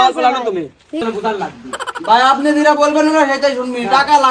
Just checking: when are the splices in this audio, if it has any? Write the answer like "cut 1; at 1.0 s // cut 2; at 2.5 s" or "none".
cut 1; at 1.0 s